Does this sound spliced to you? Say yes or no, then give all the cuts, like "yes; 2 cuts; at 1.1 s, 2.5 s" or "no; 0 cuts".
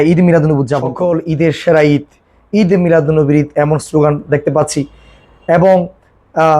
yes; 1 cut; at 0.9 s